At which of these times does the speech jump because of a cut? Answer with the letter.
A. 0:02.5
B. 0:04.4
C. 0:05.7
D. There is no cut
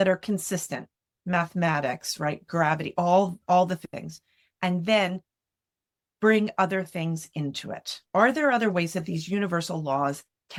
D